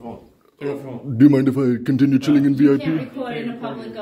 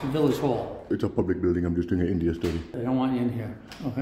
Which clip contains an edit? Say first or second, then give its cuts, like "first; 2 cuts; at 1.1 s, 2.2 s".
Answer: second; 2 cuts; at 0.9 s, 2.7 s